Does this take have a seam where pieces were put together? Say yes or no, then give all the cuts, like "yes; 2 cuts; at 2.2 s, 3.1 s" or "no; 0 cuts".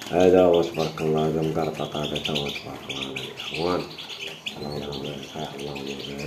yes; 1 cut; at 5.3 s